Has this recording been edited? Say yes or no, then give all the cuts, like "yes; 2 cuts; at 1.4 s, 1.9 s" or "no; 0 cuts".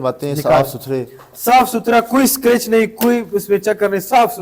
no; 0 cuts